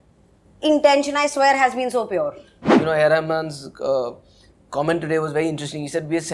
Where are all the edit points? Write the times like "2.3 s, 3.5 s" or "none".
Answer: 2.8 s